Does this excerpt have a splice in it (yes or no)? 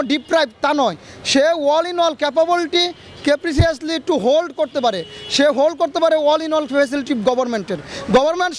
no